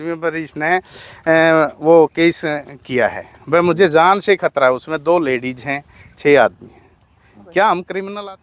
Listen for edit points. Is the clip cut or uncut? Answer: uncut